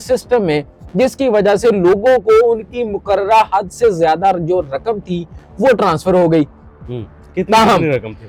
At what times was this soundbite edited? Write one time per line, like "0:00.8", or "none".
none